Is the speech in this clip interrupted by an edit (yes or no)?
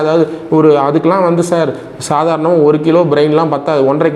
no